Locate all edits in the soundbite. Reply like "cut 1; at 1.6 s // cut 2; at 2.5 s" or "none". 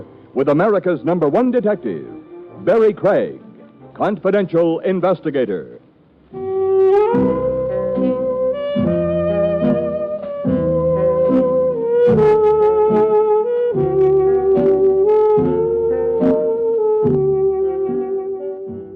cut 1; at 14.6 s